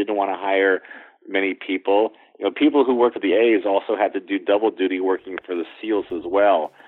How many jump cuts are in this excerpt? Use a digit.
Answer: 1